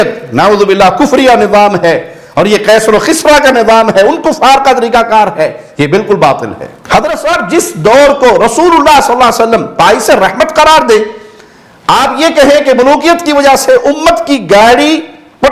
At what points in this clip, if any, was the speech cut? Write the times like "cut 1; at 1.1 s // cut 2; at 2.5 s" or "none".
cut 1; at 6.7 s